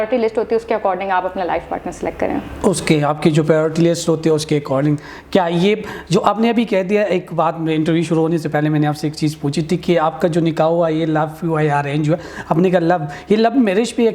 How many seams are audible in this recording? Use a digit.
0